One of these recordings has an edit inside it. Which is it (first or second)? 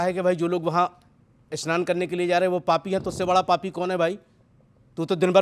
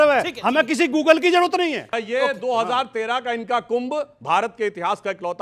second